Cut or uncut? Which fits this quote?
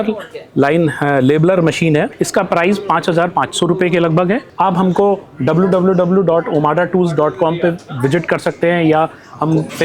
cut